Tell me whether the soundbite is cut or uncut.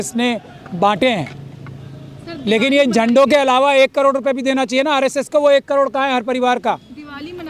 uncut